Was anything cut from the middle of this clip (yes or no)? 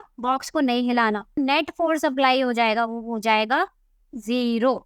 yes